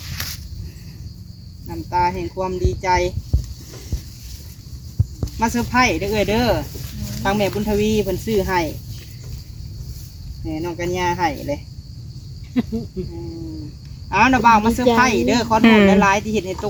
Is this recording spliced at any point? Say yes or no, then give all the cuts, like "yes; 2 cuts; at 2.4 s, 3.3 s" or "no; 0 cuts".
no; 0 cuts